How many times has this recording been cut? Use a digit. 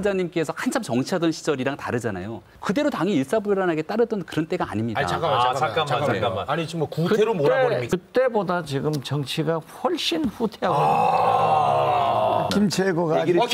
3